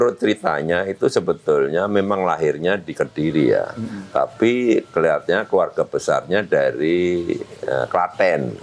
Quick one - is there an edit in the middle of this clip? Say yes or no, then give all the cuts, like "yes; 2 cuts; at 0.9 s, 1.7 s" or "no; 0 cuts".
no; 0 cuts